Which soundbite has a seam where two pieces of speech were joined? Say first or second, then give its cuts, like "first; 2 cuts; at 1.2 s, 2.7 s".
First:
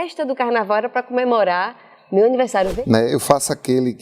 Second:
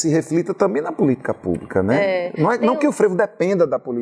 first; 1 cut; at 2.7 s